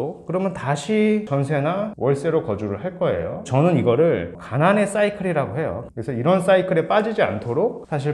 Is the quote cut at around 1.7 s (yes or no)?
no